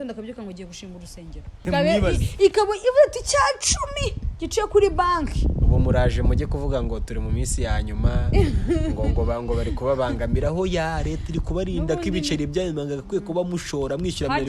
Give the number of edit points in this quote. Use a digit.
1